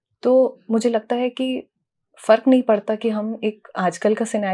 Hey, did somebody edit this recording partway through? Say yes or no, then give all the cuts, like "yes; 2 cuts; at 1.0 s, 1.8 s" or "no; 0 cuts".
no; 0 cuts